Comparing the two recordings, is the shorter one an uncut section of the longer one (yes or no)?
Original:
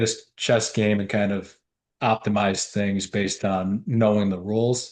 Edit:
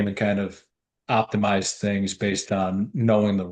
yes